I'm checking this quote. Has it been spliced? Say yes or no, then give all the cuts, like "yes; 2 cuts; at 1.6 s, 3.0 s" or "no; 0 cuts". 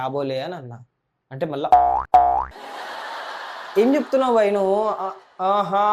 no; 0 cuts